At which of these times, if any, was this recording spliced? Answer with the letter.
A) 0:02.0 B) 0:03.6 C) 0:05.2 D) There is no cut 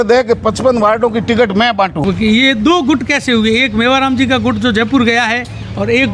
A